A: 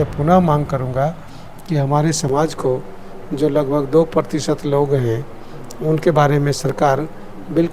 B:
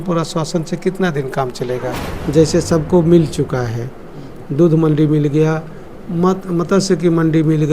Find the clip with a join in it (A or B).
B